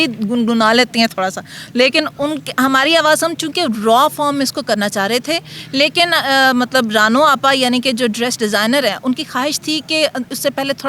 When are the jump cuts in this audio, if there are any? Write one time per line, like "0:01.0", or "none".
none